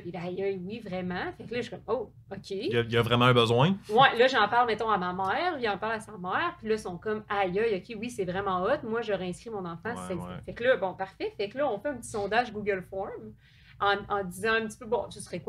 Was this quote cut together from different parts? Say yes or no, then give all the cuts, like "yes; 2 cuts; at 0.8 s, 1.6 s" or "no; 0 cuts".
no; 0 cuts